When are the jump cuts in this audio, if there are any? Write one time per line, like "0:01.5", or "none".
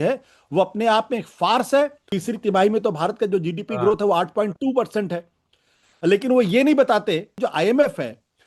0:02.1
0:07.3